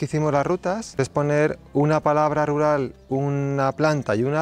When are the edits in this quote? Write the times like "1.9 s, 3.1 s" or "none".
0.9 s